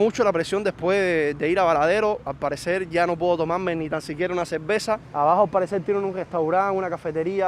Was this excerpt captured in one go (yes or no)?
no